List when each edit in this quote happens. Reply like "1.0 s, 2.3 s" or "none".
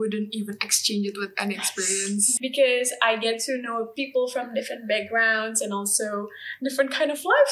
2.3 s